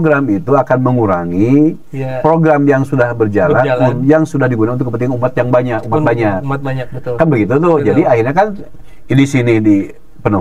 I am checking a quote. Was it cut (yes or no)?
no